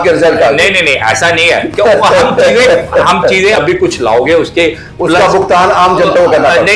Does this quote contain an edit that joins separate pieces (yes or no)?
yes